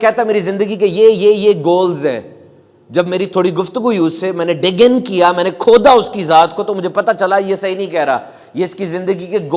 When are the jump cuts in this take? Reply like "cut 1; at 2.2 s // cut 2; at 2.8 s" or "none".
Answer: none